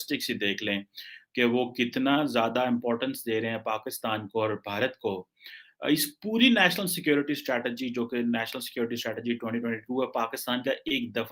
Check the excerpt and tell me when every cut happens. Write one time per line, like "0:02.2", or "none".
none